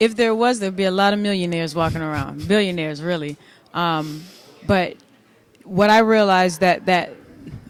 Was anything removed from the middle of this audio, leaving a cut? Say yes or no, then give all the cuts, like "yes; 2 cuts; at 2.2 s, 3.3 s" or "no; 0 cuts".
no; 0 cuts